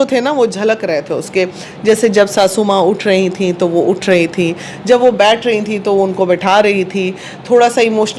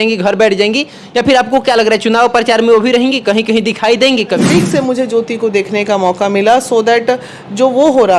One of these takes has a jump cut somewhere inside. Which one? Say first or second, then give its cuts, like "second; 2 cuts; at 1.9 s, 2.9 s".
second; 1 cut; at 4.4 s